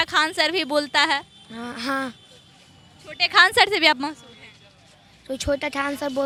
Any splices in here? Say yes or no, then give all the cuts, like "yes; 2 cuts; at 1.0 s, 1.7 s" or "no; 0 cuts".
no; 0 cuts